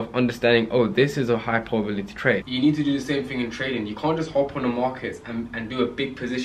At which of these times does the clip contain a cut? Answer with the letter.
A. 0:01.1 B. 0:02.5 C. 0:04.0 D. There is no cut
B